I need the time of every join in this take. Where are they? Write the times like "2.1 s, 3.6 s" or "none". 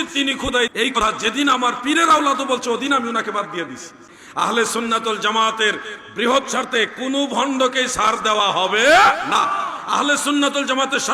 1.0 s, 4.2 s